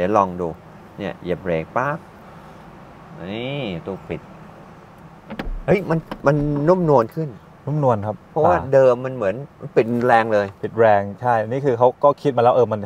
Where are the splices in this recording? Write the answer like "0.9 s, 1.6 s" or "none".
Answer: none

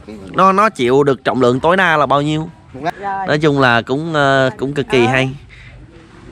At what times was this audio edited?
2.9 s

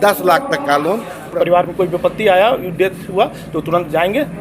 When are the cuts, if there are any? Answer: 1.2 s

